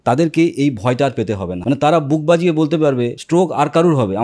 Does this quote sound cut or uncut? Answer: cut